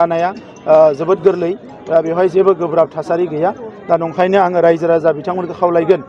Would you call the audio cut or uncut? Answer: uncut